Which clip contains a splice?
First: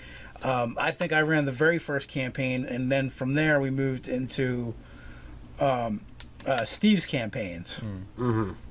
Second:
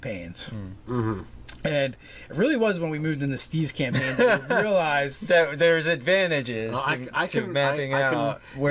second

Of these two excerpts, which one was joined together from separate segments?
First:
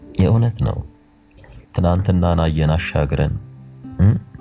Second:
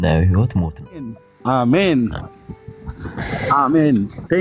second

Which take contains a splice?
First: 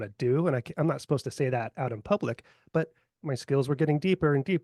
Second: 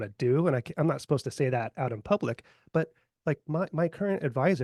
first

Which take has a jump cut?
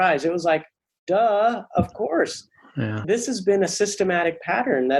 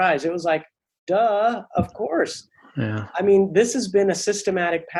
first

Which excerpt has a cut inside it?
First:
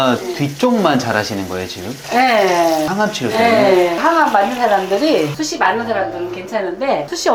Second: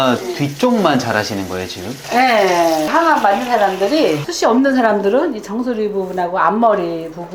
second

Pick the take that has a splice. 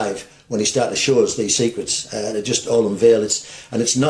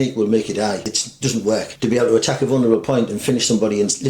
second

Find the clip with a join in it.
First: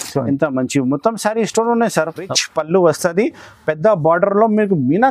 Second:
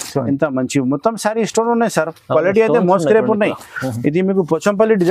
first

